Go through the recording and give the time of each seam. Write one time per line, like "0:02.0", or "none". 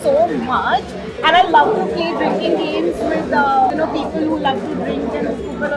none